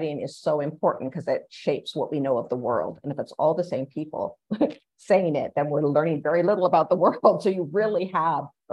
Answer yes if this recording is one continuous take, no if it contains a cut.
yes